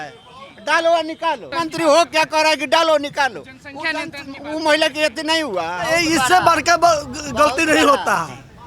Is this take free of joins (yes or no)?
no